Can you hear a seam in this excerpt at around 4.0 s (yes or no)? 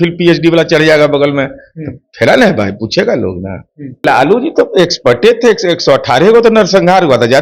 yes